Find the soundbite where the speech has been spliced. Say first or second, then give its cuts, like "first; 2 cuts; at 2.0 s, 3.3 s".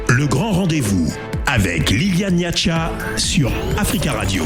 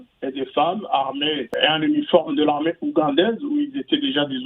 second; 1 cut; at 1.5 s